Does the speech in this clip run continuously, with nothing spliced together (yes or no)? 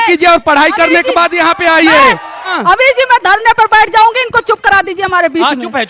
no